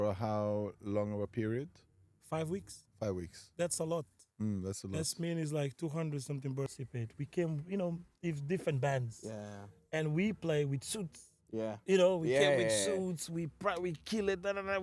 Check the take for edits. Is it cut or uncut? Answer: cut